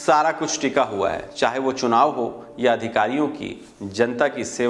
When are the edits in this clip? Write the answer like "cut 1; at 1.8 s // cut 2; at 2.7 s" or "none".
none